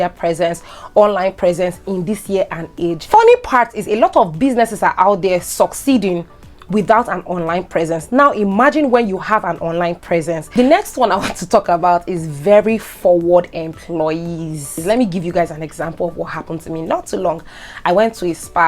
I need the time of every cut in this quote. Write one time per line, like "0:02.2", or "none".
0:03.0
0:10.4
0:14.8